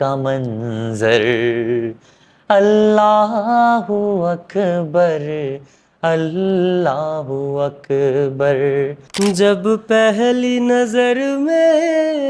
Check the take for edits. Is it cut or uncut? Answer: cut